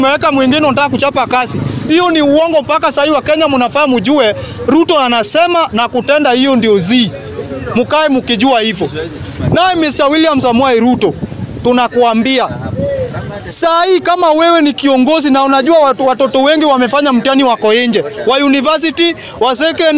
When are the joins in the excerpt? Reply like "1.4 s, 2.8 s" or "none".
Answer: none